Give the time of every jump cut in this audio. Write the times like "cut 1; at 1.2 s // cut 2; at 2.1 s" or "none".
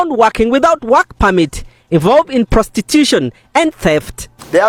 none